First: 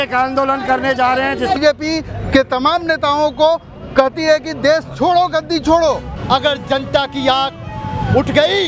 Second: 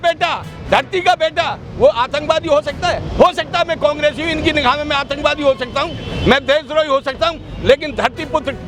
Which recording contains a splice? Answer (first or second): first